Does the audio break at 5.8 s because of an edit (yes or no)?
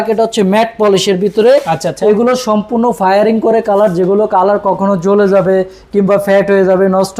no